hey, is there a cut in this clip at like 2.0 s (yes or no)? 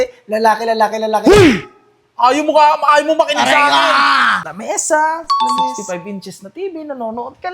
no